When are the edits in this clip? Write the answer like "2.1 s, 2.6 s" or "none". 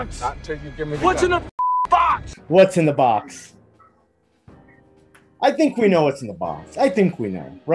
none